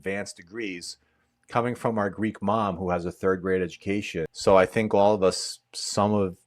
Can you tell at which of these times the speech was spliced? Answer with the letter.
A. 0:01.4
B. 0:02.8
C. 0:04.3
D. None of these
C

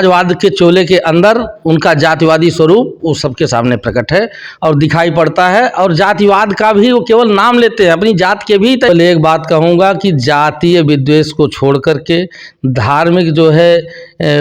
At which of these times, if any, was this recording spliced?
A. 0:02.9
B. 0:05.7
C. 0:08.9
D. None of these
C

